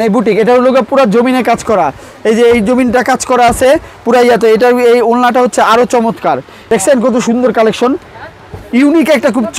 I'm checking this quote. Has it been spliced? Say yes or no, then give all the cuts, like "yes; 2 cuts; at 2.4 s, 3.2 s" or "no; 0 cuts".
yes; 1 cut; at 6.5 s